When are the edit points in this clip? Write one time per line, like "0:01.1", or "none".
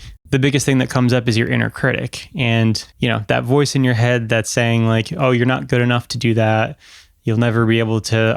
0:02.9

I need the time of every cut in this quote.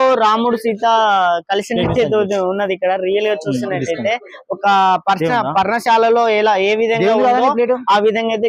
none

